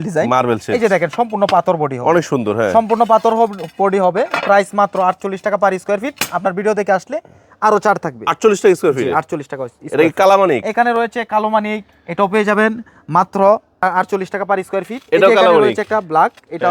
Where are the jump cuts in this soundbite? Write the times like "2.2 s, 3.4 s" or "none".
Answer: none

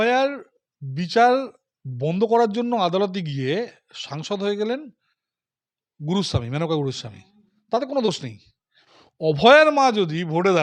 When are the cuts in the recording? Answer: none

